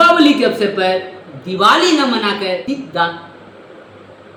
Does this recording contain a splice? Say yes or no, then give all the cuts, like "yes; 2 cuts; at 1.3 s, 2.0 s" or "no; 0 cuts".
no; 0 cuts